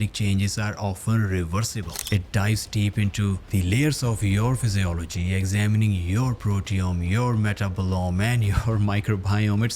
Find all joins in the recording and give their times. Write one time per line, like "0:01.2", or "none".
0:01.9
0:03.4